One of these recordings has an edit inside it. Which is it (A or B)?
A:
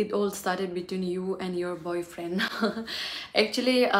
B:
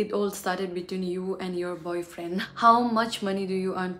B